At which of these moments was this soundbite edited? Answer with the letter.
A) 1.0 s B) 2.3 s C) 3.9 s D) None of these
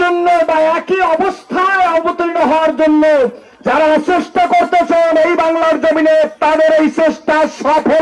D